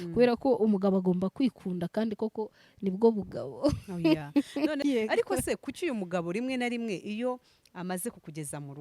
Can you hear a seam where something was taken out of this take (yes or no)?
yes